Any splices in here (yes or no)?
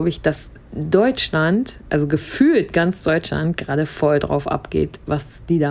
no